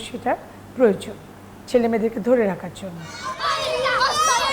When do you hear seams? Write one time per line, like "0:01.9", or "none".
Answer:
none